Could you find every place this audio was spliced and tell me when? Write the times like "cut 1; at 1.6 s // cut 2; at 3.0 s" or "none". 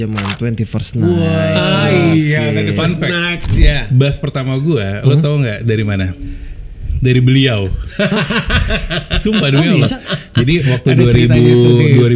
none